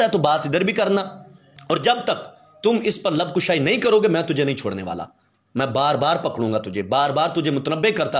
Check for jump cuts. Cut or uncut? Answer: cut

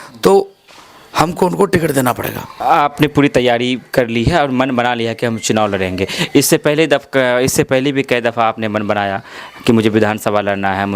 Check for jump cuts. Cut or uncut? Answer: cut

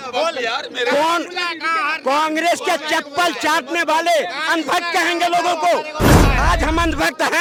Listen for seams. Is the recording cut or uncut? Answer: uncut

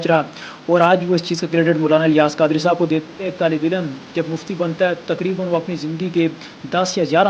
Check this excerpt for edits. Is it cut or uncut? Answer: cut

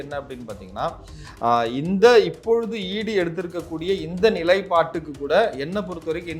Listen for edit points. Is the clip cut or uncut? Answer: uncut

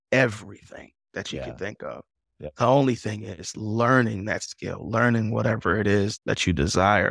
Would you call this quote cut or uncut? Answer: cut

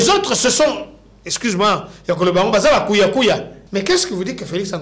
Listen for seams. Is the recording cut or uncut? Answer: cut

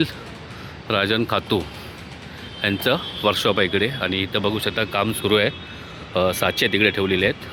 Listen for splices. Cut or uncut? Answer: uncut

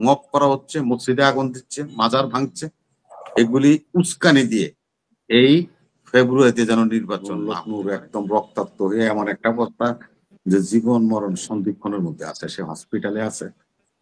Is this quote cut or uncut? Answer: cut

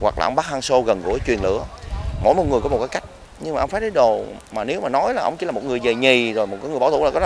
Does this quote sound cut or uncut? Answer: uncut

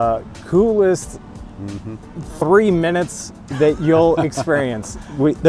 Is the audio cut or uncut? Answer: uncut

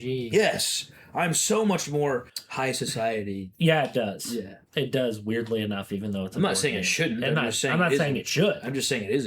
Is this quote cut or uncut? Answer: cut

